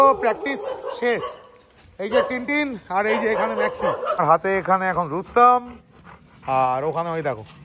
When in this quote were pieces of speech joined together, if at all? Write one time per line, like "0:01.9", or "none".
0:04.2